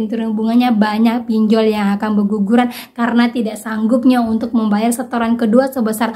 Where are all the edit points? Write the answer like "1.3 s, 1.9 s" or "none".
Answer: none